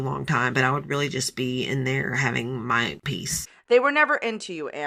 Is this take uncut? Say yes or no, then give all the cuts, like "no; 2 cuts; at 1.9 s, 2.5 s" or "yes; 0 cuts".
yes; 0 cuts